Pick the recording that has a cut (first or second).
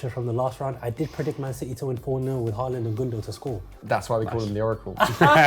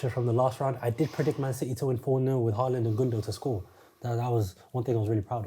first